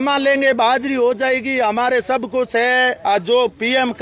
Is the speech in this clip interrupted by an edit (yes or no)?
no